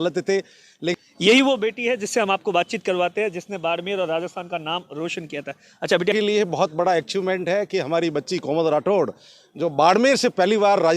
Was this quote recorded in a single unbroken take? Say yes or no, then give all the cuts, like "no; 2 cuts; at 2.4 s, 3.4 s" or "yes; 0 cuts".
no; 2 cuts; at 0.9 s, 6.1 s